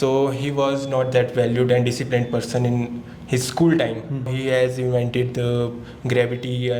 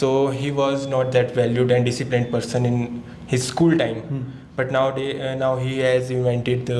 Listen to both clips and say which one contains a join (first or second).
first